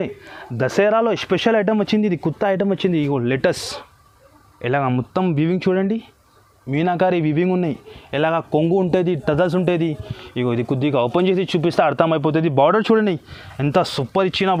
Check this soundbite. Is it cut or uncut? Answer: uncut